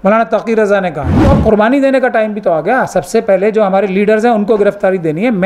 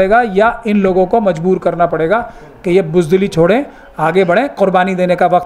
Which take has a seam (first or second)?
first